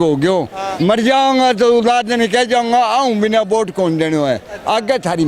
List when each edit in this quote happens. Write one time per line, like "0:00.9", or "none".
none